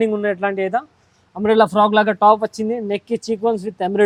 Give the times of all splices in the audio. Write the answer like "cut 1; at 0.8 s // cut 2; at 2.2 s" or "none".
none